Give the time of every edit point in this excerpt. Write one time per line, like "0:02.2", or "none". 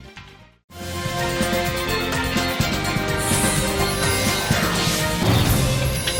none